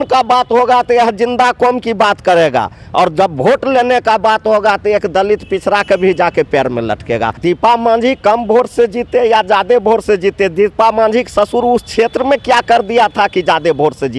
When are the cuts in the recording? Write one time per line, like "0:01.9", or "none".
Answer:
0:07.4

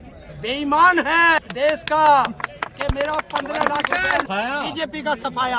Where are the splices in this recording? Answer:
0:01.4
0:04.3

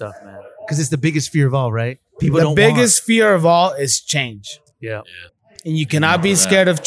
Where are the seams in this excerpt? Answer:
0:05.0

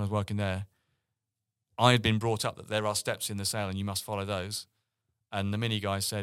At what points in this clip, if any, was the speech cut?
none

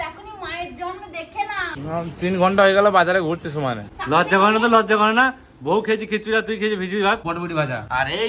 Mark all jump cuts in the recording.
0:01.7
0:03.9
0:07.2

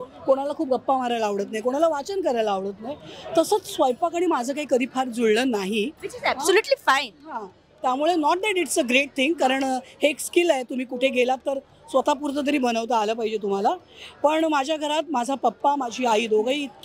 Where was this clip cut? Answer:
none

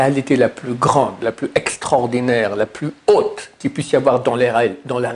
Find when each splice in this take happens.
none

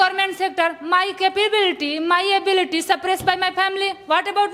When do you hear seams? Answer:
none

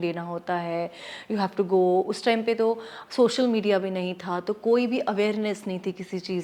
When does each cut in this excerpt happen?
none

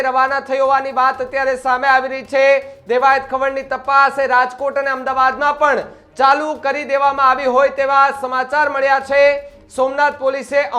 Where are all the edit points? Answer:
none

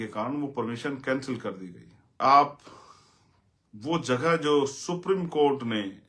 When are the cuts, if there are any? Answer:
0:02.2

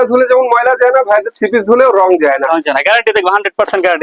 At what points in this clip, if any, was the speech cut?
none

